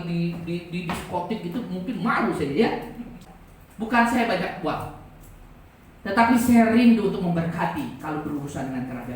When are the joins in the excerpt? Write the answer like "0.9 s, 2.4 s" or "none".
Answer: 3.3 s